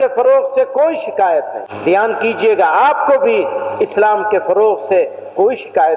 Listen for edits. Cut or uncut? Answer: cut